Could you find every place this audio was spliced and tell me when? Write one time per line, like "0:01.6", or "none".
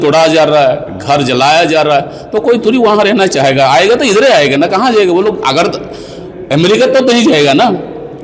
none